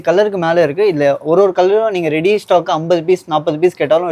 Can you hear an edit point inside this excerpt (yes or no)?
no